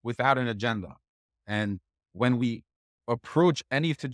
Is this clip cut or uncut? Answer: uncut